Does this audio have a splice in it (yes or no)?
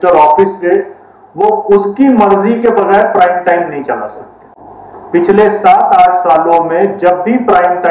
no